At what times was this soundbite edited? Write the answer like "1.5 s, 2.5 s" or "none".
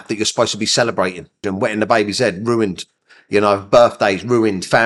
1.5 s

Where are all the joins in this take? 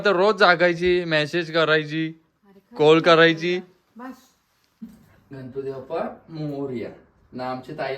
4.8 s

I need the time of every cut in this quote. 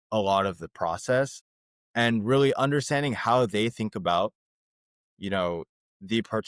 none

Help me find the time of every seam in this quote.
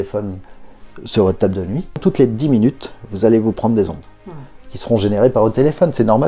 2.0 s

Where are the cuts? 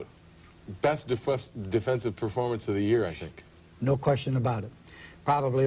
4.5 s

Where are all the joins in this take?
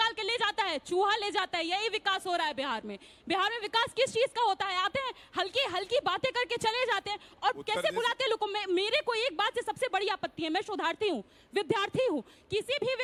none

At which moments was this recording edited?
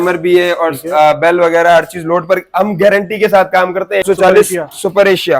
4.0 s

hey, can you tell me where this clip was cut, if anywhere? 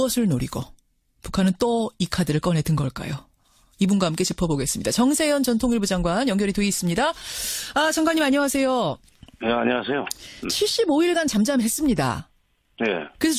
5.1 s

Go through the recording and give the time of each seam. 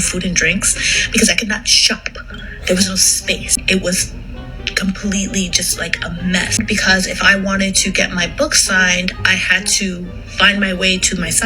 3.6 s, 6.6 s

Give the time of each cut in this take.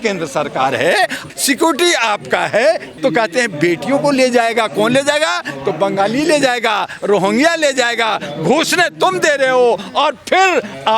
1.3 s, 2.9 s

